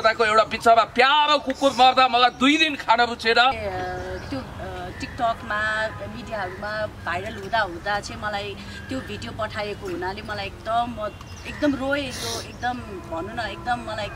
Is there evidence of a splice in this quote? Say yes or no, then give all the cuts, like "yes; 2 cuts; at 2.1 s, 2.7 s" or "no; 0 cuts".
yes; 1 cut; at 3.6 s